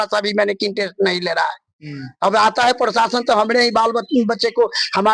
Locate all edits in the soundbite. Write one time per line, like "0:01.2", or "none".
none